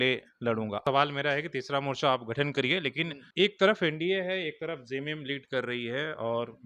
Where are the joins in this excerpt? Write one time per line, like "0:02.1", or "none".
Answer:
0:00.8
0:03.3